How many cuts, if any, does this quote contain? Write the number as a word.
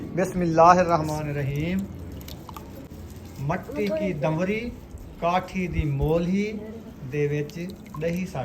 one